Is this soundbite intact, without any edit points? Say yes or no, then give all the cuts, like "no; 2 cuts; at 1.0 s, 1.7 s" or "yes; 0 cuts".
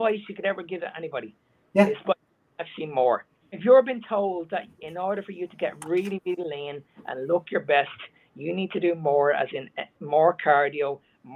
no; 1 cut; at 3.6 s